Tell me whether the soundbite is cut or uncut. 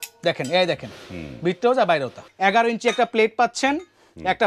cut